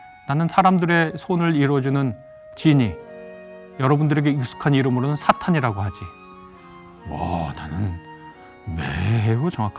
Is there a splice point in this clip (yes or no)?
no